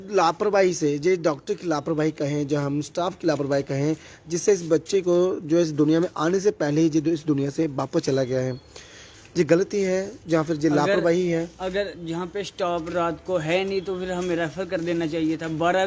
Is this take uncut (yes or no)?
yes